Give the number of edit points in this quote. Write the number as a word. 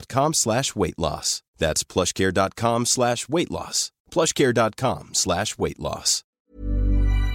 one